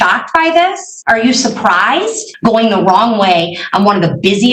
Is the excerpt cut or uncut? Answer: cut